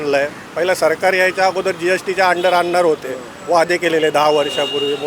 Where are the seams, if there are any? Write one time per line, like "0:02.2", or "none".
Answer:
none